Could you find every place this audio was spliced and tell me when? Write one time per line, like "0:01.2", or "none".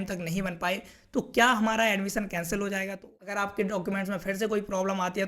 0:03.0